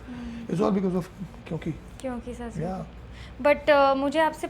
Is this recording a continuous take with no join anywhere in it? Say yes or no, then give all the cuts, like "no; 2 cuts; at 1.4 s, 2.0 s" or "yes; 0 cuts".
yes; 0 cuts